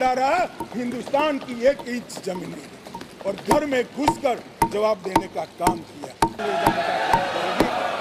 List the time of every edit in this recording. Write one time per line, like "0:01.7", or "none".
0:03.1
0:06.4